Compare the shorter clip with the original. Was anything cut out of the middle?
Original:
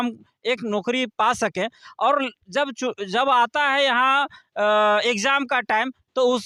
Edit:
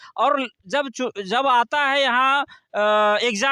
no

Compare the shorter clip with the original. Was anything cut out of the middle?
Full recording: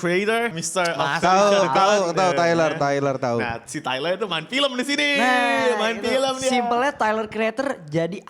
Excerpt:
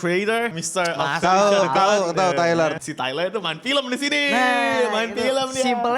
yes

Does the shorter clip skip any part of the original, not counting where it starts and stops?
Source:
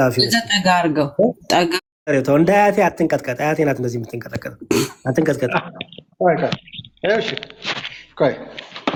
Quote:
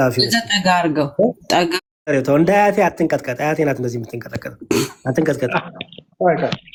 no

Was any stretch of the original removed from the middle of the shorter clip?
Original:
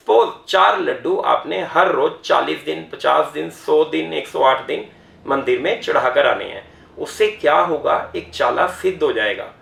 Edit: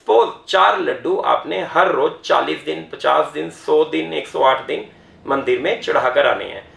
no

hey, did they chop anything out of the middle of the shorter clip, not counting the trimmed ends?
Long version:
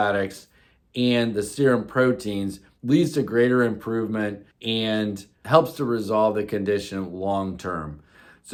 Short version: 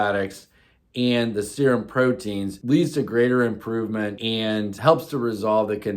yes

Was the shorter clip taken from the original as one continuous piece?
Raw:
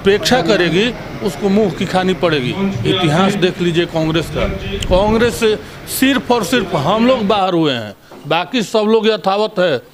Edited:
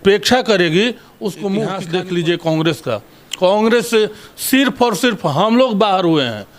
no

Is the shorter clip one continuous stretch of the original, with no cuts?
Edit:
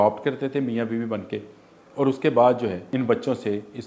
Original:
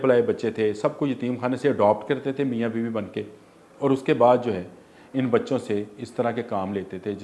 no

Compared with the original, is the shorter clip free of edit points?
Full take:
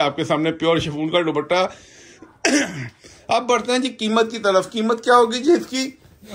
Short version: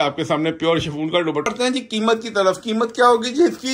no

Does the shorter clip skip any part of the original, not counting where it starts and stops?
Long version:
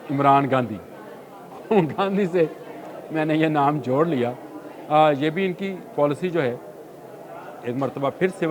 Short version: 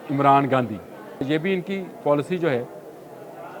yes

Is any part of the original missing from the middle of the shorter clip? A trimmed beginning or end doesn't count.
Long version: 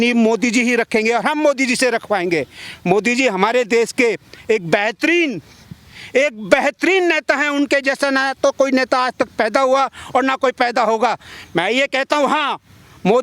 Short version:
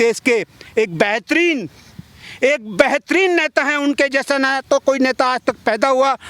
no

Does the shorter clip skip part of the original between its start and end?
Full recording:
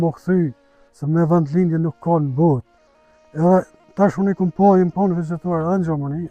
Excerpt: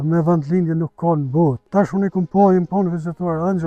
yes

